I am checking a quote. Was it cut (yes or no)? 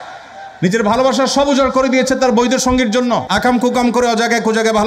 yes